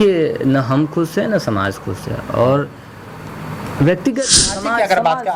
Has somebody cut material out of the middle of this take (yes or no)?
yes